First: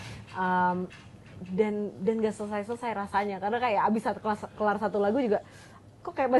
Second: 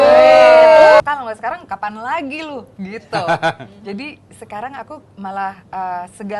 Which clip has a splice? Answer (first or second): second